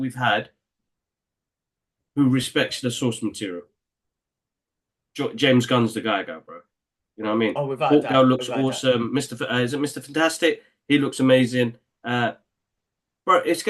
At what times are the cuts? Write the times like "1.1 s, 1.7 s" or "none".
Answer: none